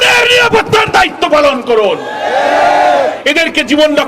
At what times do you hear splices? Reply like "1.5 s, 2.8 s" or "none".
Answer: 3.2 s